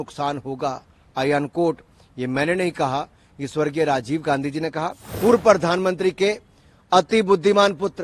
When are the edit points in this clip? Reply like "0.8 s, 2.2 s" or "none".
5.0 s